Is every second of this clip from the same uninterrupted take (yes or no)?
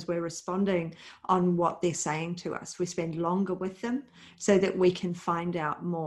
yes